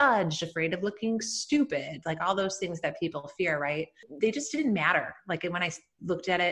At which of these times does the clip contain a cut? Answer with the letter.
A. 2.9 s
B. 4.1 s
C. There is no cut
B